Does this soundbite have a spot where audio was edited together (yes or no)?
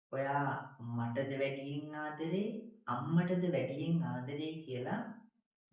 no